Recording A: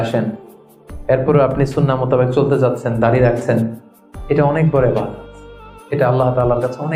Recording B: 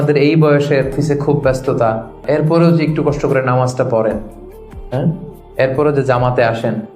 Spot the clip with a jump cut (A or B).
B